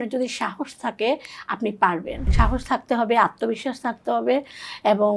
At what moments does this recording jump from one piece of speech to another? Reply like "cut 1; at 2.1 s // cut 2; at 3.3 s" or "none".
cut 1; at 2.3 s